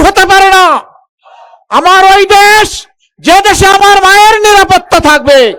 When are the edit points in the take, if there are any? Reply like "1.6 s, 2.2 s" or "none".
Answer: none